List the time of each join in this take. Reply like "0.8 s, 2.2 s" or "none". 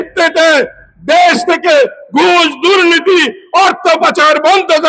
none

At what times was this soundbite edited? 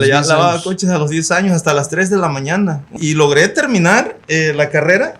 2.9 s

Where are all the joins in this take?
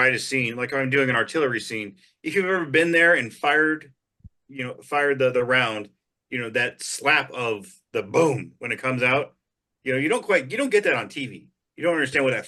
none

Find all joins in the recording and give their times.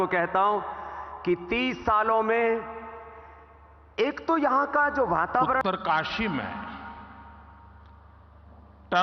5.6 s

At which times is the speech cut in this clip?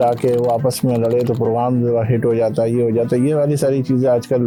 none

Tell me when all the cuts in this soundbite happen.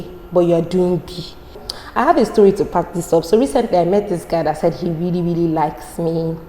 1.6 s

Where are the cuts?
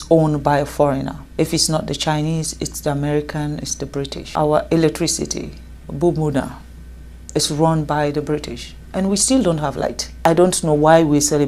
1.2 s, 4.2 s, 10.2 s

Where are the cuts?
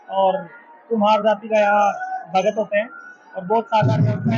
none

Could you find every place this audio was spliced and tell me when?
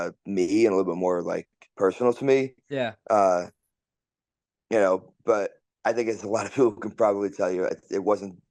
none

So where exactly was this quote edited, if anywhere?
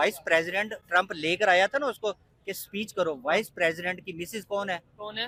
none

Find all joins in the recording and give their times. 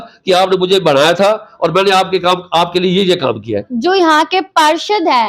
3.7 s

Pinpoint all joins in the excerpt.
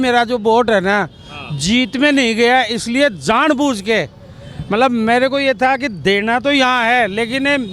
none

